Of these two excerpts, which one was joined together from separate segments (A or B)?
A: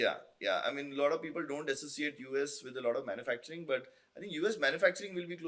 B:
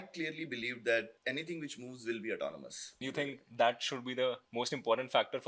B